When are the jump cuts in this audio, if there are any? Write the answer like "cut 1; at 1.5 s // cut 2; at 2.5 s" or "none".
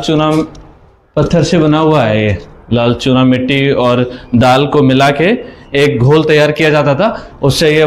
none